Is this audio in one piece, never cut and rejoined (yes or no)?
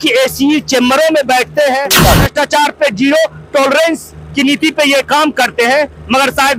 no